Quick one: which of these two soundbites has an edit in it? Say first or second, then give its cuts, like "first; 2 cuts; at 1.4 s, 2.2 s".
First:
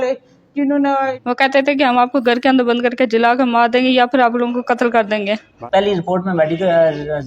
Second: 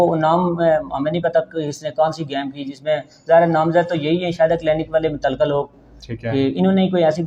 first; 2 cuts; at 1.2 s, 5.5 s